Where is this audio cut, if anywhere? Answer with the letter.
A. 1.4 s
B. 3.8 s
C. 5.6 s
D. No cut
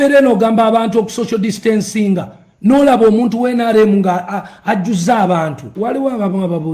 C